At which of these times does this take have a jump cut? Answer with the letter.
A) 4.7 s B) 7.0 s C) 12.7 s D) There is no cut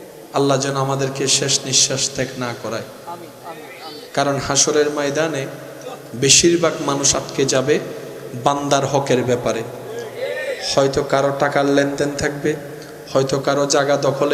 D